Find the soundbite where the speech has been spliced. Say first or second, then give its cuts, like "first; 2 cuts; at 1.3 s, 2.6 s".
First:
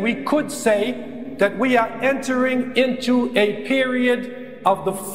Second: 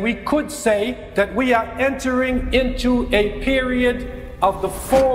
second; 1 cut; at 1.0 s